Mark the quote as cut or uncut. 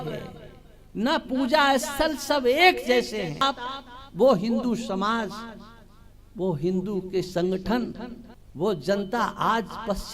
cut